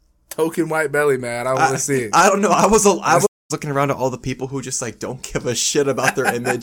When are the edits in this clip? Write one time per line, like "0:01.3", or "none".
0:03.3

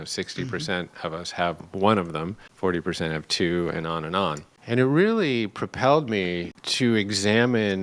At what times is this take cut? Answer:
0:02.4
0:04.5
0:06.6

